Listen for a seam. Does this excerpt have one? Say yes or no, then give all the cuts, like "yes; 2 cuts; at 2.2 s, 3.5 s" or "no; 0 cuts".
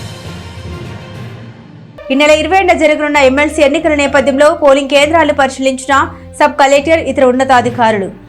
yes; 1 cut; at 1.4 s